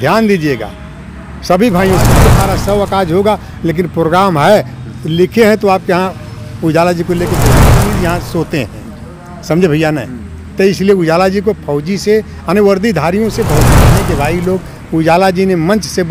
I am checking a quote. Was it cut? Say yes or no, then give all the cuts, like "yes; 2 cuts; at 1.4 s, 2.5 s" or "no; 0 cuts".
yes; 3 cuts; at 2.3 s, 7.8 s, 13.8 s